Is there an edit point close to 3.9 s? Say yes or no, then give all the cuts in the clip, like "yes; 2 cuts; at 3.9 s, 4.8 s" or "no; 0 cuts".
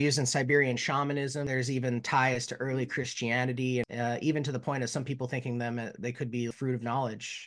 yes; 3 cuts; at 1.5 s, 3.9 s, 6.5 s